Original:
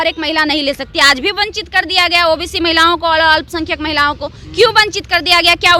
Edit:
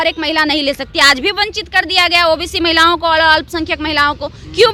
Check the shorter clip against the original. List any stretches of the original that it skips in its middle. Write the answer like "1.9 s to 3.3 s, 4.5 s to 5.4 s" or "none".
none

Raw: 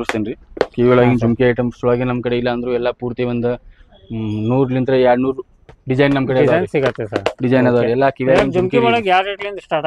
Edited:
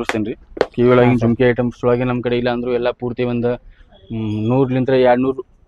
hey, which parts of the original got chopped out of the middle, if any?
none

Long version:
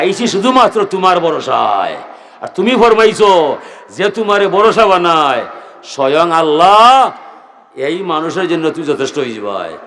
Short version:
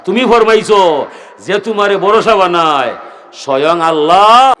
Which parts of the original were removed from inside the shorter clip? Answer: none

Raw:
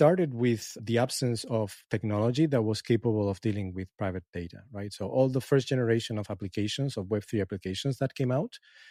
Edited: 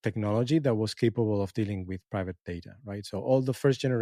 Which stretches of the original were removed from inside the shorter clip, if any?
none

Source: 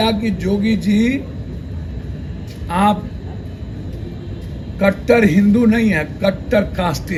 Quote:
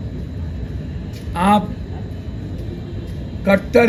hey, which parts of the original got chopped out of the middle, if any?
none

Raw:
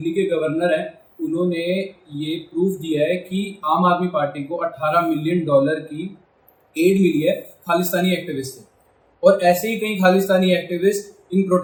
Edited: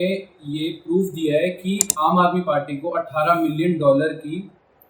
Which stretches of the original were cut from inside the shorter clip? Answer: none

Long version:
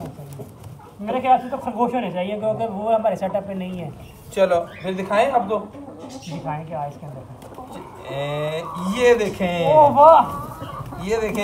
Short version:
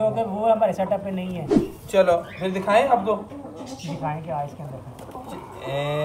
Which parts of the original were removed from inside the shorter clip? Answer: none

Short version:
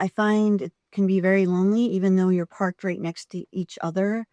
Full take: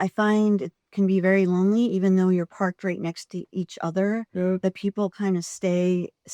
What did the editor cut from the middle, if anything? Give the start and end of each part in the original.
none

